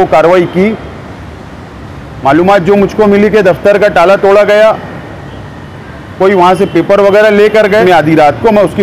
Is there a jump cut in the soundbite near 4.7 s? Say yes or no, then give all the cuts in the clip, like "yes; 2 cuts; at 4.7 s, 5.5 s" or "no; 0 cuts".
no; 1 cut; at 7.8 s